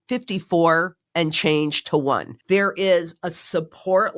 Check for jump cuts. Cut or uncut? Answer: cut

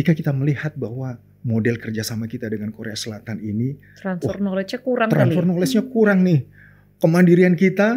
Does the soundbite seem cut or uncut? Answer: uncut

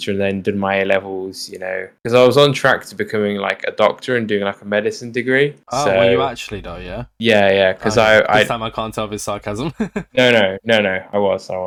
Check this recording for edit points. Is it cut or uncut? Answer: uncut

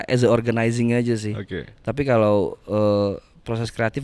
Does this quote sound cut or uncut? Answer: uncut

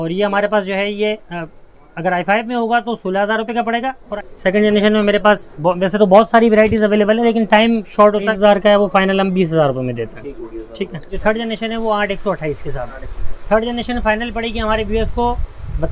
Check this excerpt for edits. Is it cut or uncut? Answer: cut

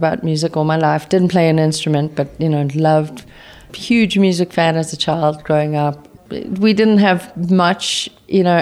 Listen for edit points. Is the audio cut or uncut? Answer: cut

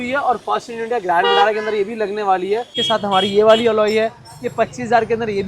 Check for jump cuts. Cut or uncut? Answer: cut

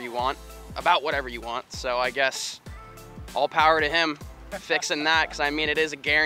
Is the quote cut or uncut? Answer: uncut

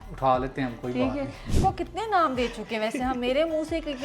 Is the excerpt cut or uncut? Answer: cut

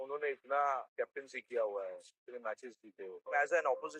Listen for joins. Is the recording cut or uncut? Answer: cut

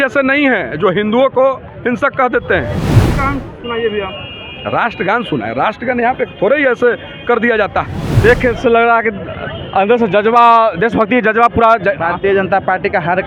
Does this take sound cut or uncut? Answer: cut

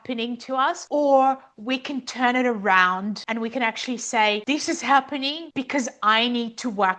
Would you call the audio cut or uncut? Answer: cut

